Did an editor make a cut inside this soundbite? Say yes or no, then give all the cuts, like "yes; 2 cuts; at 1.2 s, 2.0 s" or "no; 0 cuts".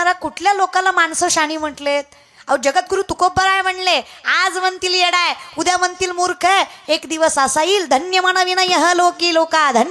no; 0 cuts